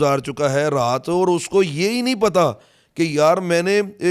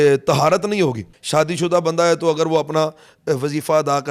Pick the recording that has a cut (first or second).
second